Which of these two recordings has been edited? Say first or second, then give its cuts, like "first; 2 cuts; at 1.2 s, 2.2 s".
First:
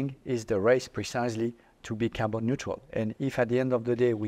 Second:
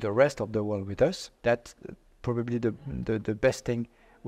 second; 1 cut; at 1.3 s